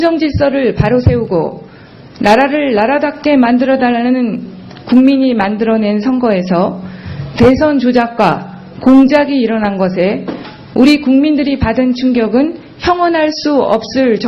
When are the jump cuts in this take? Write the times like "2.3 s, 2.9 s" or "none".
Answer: none